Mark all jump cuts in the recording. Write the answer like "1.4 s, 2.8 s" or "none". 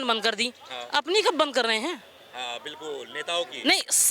none

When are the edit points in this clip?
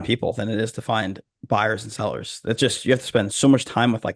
none

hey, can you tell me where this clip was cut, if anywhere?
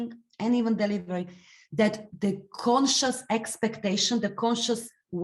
2.0 s

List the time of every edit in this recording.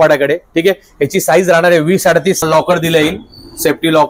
2.4 s

